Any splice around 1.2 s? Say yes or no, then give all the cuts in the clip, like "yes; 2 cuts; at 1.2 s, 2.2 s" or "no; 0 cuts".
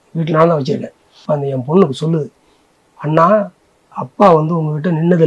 yes; 1 cut; at 1.2 s